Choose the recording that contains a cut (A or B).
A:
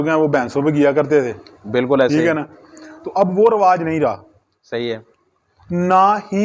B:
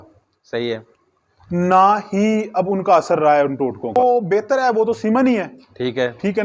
B